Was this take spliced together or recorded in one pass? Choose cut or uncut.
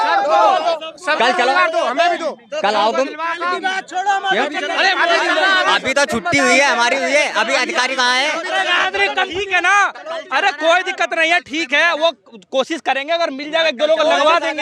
uncut